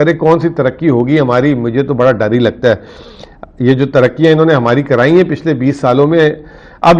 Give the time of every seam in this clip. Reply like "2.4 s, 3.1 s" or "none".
none